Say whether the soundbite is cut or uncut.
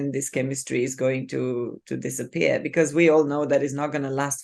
uncut